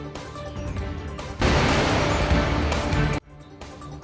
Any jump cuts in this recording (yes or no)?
yes